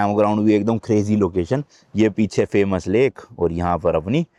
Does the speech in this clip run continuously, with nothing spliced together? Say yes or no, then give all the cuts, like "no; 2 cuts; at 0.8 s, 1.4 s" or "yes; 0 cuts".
yes; 0 cuts